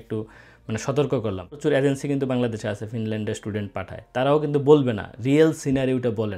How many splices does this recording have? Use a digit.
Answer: 1